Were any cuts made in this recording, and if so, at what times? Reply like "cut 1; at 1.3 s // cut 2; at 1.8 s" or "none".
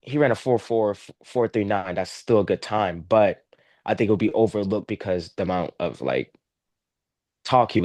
none